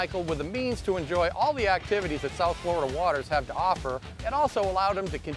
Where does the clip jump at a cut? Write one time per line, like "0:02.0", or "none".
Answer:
0:04.2